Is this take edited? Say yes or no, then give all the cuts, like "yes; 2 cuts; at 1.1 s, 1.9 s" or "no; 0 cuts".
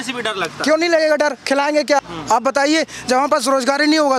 no; 0 cuts